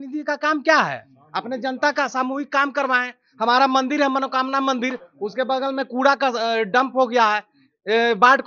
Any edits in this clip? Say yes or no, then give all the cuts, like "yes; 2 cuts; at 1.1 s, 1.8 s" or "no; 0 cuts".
no; 0 cuts